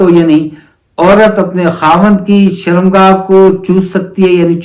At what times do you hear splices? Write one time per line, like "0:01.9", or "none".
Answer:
none